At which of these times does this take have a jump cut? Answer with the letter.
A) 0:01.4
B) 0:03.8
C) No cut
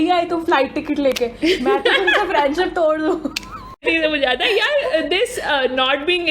B